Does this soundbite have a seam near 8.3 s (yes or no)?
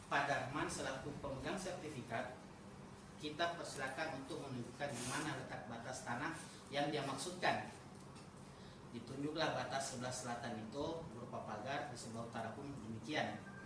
no